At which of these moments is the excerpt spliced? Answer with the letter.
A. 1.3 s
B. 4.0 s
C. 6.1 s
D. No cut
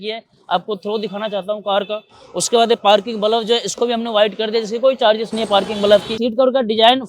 C